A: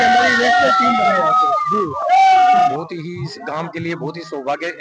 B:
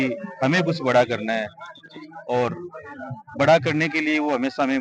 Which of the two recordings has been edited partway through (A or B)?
A